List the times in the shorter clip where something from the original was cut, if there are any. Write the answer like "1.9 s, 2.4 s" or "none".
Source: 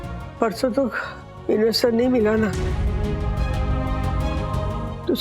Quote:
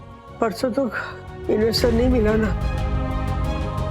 2.5 s